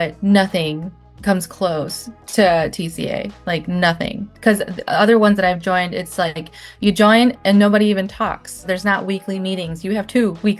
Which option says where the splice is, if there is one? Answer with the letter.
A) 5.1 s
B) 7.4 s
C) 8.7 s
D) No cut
C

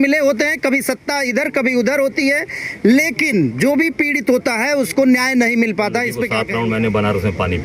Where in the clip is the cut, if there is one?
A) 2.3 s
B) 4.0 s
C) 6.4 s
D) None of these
C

